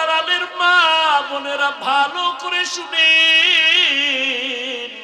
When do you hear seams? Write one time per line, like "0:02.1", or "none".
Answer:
none